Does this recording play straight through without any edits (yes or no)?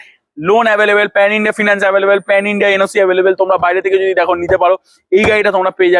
yes